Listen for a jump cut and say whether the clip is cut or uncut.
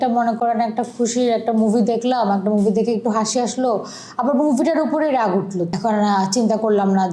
cut